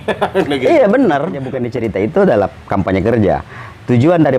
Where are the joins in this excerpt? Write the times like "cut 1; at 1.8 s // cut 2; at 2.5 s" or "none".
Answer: cut 1; at 1.6 s